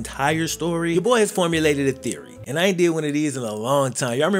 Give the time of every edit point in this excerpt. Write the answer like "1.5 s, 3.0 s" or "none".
0.9 s

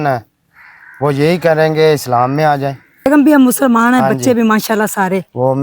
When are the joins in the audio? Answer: 3.1 s

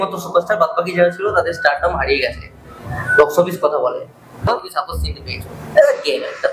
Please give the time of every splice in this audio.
4.5 s

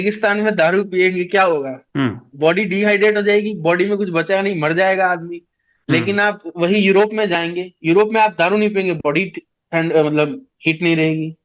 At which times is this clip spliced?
1.8 s

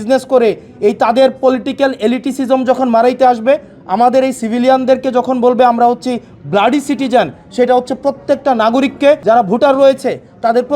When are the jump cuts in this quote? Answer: 9.2 s

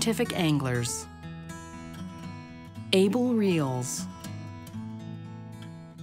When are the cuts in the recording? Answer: 4.3 s

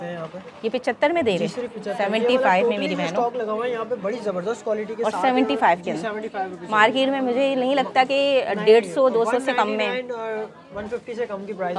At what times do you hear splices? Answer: none

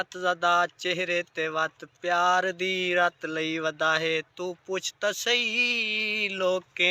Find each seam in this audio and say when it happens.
none

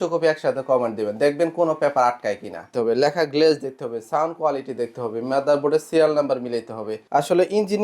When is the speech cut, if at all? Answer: 2.7 s, 7.0 s

